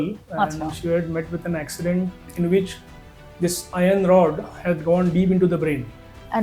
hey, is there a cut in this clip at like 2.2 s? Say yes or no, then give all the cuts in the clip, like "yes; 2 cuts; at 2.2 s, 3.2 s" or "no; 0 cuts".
yes; 1 cut; at 2.2 s